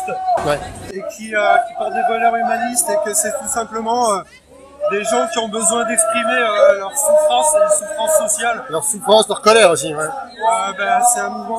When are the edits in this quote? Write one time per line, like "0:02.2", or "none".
none